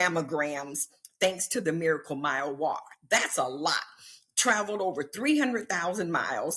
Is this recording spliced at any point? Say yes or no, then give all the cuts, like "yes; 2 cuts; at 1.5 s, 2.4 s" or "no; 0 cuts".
no; 0 cuts